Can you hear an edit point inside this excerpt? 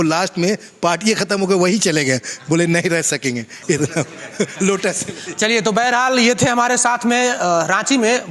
no; 0 cuts

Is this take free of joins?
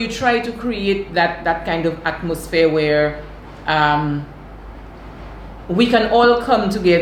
yes; 0 cuts

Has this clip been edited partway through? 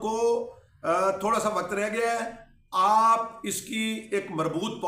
no; 0 cuts

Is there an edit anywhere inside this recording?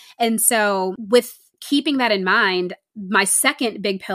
yes; 1 cut; at 1.0 s

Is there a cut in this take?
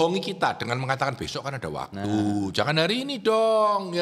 no; 0 cuts

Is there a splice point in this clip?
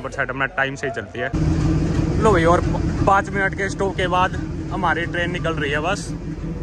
yes; 1 cut; at 1.3 s

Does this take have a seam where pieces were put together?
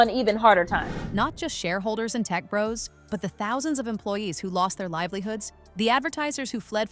no; 0 cuts

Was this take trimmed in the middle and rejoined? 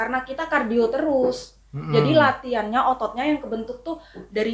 no; 0 cuts

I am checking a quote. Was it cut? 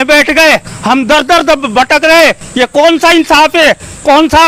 no; 0 cuts

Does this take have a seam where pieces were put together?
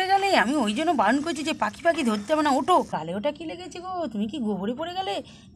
yes; 1 cut; at 2.9 s

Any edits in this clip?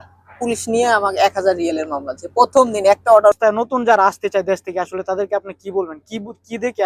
yes; 1 cut; at 3.3 s

